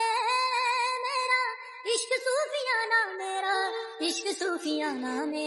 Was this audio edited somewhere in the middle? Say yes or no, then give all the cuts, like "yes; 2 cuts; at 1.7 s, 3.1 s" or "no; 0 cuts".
no; 0 cuts